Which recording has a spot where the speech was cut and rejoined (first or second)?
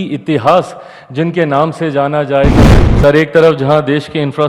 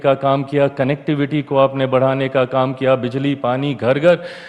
first